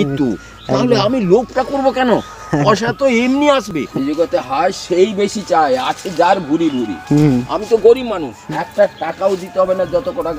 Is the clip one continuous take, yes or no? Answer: no